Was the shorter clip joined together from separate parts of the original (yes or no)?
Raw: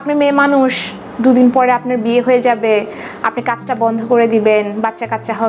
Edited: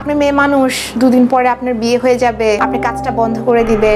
yes